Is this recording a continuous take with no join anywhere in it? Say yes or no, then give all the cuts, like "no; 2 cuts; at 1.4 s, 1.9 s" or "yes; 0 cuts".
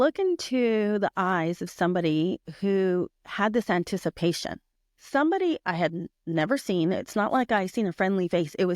no; 1 cut; at 4.9 s